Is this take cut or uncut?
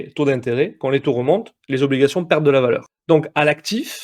cut